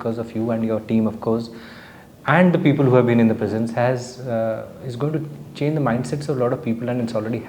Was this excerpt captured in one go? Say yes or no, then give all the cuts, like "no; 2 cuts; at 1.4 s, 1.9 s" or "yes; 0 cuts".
yes; 0 cuts